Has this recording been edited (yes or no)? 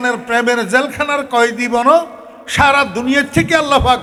no